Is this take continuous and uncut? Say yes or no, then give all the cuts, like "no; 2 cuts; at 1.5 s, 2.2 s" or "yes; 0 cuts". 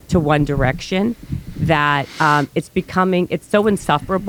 yes; 0 cuts